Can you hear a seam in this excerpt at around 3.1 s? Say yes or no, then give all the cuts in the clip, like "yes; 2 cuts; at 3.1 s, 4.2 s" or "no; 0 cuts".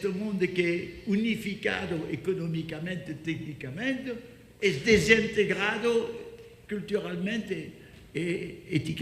yes; 1 cut; at 3.1 s